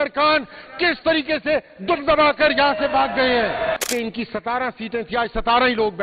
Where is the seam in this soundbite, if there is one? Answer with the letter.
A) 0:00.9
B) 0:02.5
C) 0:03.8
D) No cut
C